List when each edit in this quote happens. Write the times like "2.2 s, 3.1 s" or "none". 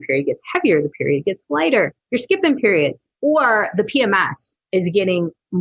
2.0 s, 3.1 s